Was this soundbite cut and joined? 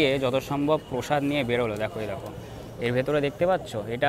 no; 0 cuts

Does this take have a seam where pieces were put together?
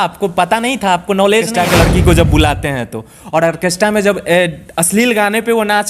yes; 1 cut; at 1.5 s

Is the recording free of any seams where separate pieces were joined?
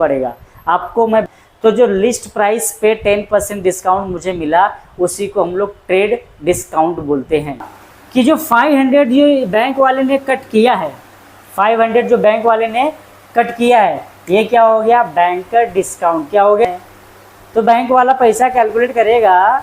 no; 3 cuts; at 1.2 s, 7.8 s, 16.7 s

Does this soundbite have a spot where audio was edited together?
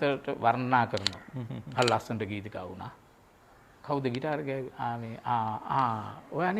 no; 0 cuts

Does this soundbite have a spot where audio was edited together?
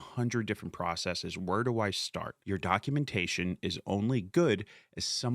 yes; 1 cut; at 2.3 s

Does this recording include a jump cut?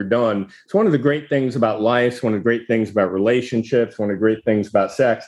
no; 0 cuts

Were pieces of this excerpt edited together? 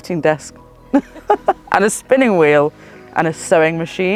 no; 0 cuts

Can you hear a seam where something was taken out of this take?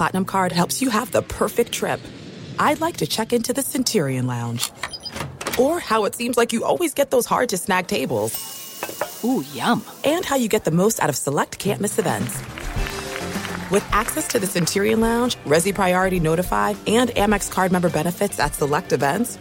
no; 0 cuts

